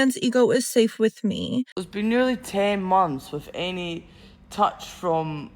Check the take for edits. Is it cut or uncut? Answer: cut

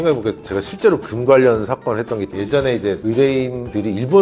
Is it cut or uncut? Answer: uncut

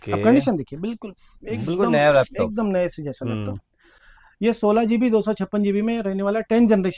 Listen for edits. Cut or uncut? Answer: uncut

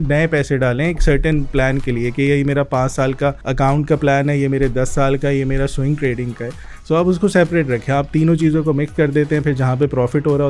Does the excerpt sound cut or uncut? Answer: cut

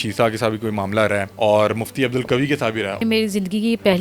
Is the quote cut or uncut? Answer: cut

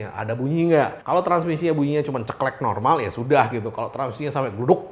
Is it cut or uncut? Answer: uncut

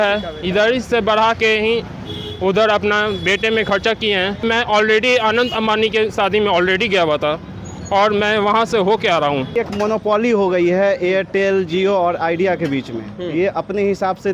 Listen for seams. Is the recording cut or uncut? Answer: cut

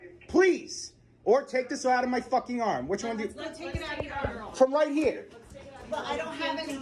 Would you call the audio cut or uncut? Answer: cut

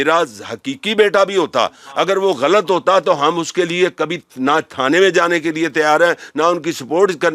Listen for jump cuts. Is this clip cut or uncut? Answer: uncut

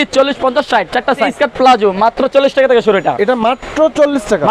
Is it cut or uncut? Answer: cut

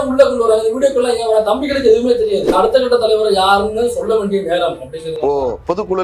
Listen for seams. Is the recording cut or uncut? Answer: cut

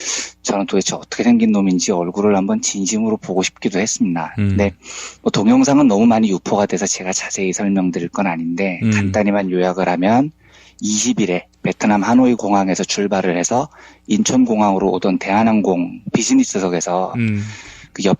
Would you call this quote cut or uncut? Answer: cut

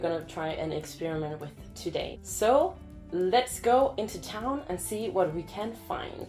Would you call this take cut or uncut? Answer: uncut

